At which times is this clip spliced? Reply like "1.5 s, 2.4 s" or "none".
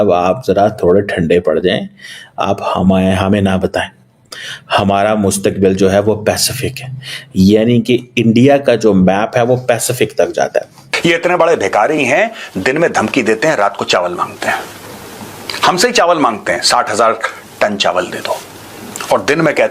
10.8 s